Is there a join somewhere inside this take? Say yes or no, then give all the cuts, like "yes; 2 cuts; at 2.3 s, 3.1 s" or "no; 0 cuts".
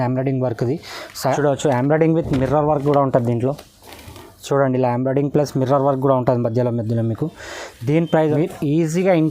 yes; 2 cuts; at 1.4 s, 8.2 s